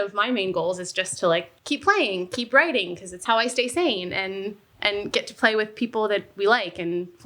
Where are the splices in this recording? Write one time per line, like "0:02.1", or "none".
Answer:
0:01.5
0:03.2